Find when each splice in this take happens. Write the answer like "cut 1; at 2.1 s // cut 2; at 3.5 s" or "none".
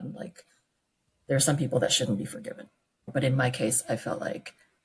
cut 1; at 3.1 s